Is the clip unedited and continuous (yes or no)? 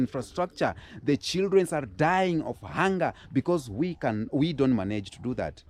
yes